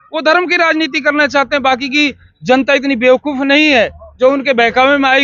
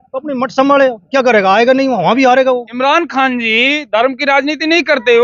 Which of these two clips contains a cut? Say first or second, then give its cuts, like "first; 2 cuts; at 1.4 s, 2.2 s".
second; 1 cut; at 2.7 s